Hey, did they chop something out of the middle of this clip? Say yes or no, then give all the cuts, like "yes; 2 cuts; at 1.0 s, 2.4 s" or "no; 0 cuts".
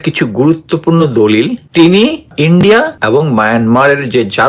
yes; 3 cuts; at 1.6 s, 2.3 s, 3.0 s